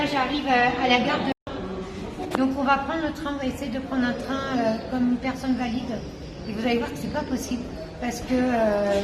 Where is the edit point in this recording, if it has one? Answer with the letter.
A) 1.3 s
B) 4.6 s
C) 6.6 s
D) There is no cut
A